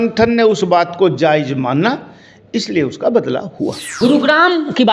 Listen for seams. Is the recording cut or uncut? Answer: cut